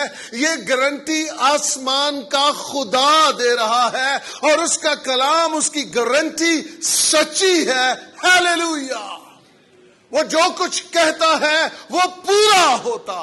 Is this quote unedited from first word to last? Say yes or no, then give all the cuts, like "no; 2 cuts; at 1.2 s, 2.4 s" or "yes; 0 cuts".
yes; 0 cuts